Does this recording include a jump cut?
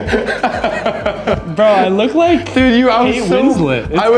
yes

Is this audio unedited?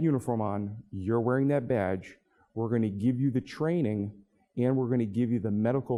yes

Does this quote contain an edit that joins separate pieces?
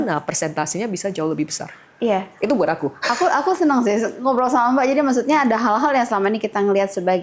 no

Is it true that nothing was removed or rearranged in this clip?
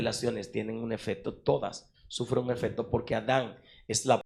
yes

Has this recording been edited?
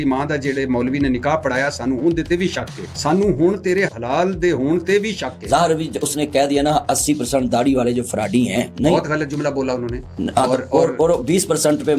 no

